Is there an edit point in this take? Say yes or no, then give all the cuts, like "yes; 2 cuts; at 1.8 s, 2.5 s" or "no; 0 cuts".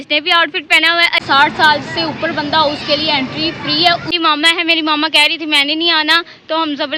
yes; 2 cuts; at 1.2 s, 4.1 s